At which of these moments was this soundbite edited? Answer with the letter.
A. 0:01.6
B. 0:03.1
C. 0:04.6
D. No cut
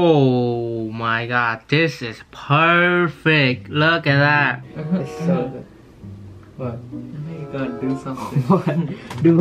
C